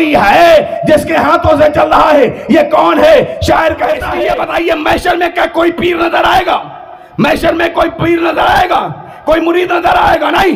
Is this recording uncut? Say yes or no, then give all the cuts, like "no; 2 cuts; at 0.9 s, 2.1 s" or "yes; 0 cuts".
no; 1 cut; at 4.0 s